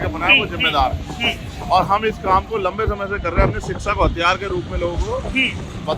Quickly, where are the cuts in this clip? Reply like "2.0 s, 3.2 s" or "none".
none